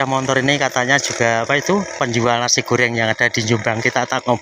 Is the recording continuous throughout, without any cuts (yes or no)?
yes